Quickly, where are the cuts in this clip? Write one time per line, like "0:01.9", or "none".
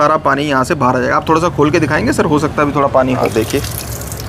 none